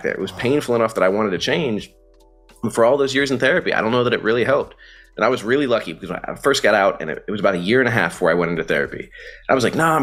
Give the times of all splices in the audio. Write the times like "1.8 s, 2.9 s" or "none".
none